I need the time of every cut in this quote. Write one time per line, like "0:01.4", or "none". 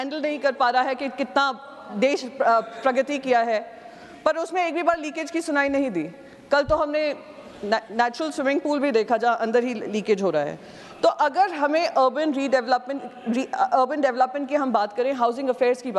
none

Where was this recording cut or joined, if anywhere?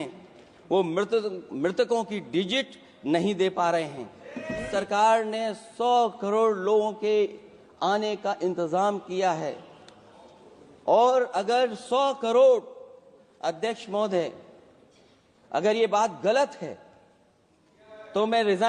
0:04.7

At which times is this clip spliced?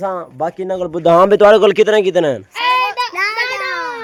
none

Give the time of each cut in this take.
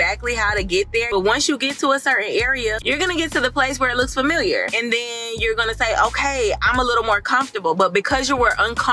0:01.1
0:02.8

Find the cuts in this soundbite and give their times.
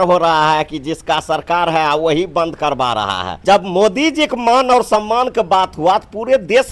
0:03.2

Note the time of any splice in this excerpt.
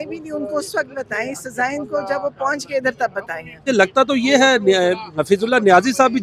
0:03.7

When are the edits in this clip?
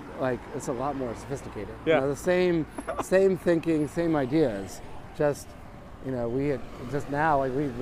none

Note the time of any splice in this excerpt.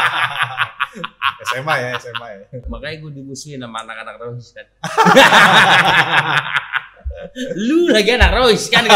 0:02.6

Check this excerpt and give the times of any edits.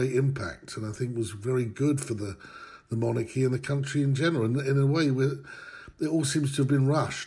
none

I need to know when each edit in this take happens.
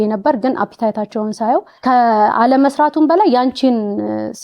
0:01.7

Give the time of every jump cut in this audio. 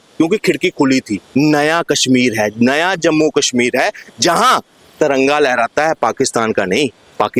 0:01.2

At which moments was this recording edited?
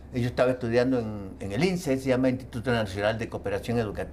none

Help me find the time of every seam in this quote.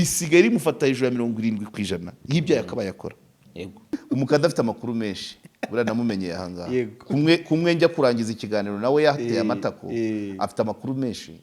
0:03.9

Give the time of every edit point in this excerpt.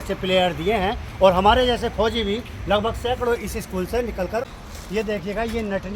0:04.8

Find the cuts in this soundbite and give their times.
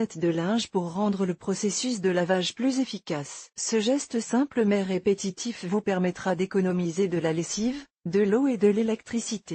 none

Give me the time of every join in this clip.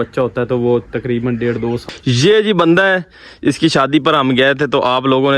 0:01.9

